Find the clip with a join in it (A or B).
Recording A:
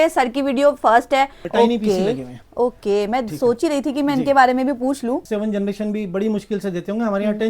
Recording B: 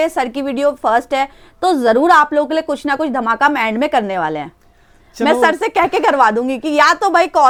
A